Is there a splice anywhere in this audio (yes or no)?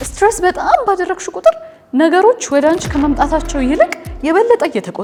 no